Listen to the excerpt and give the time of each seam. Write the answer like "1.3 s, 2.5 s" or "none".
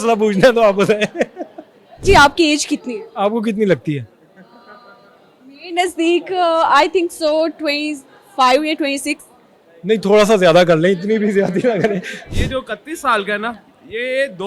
2.0 s, 12.2 s

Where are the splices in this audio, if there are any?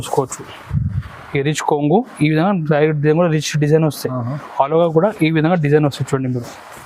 none

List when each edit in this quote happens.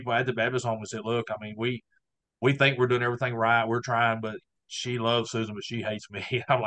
none

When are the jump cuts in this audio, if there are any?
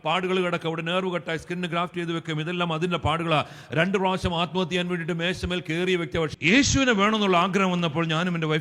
6.6 s

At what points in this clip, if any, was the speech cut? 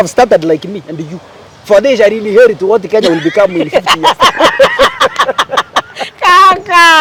none

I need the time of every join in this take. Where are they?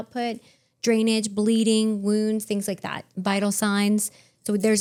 none

